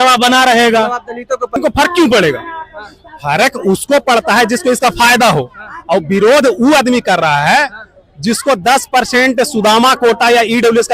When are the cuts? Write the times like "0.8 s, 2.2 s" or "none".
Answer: 1.6 s